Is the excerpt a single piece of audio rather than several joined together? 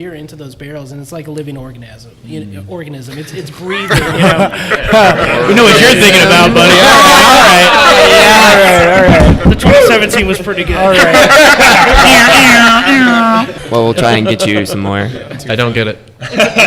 no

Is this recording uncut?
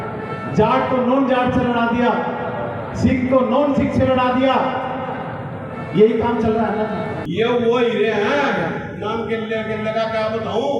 no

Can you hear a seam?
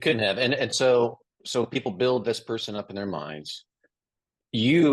no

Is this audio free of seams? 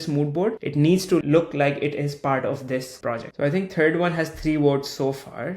no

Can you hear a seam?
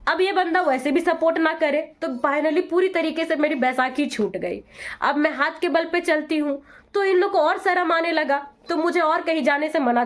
no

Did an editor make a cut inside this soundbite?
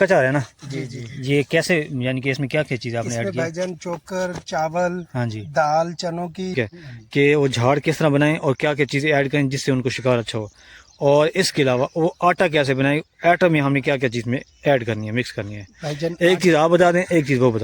yes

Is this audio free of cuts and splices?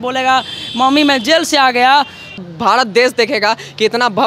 no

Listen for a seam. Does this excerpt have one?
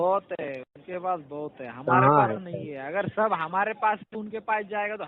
no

